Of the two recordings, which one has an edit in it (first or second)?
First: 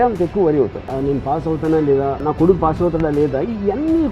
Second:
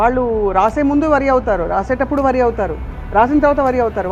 first